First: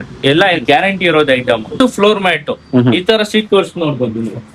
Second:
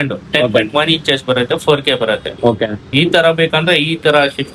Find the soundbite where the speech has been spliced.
first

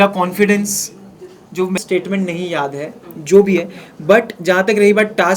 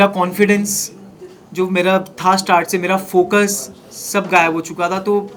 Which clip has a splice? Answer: first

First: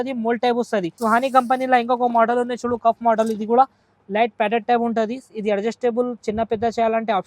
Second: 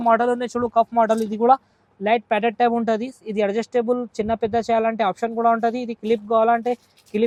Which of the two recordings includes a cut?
first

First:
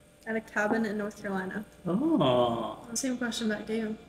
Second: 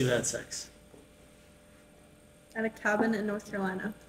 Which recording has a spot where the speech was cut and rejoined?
first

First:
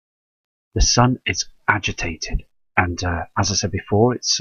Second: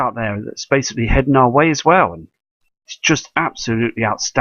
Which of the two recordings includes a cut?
second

